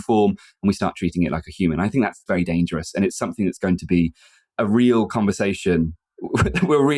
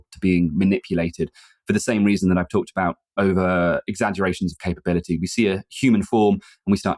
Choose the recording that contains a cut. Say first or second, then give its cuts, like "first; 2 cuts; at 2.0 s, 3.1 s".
first; 1 cut; at 2.2 s